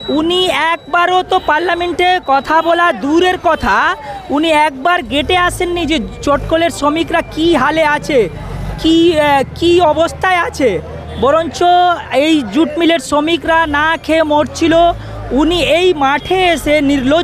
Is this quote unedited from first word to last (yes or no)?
yes